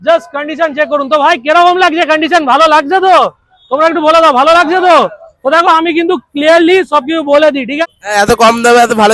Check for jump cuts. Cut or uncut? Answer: cut